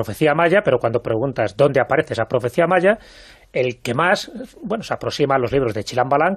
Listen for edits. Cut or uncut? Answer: cut